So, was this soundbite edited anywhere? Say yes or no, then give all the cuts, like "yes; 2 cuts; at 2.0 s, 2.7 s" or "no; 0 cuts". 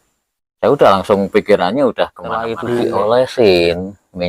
yes; 1 cut; at 2.6 s